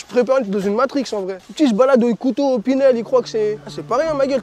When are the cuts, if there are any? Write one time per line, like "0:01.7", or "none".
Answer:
0:01.4